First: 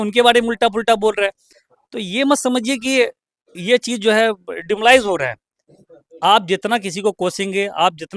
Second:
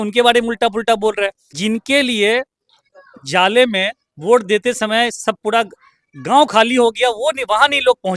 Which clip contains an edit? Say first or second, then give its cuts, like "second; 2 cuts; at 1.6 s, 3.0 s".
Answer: second; 1 cut; at 1.5 s